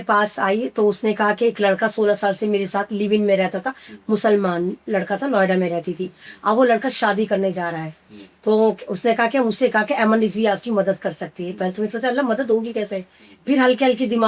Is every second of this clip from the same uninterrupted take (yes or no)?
yes